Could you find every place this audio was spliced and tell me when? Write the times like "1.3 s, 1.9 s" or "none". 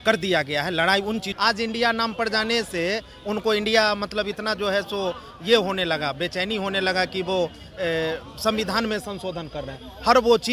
1.3 s

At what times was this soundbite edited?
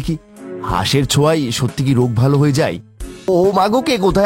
3.3 s

